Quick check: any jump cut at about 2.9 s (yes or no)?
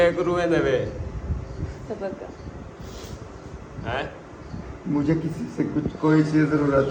no